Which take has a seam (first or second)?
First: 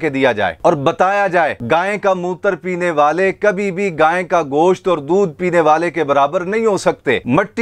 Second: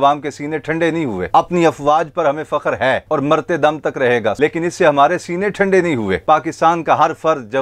second